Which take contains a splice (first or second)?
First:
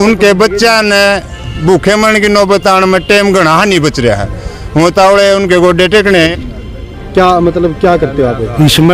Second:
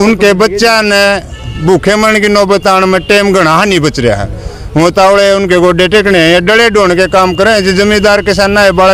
first